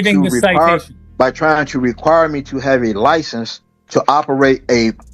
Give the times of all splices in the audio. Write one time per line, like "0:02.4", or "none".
0:01.0